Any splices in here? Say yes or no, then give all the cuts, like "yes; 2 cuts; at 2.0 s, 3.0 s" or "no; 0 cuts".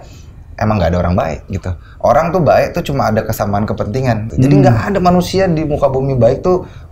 yes; 1 cut; at 4.3 s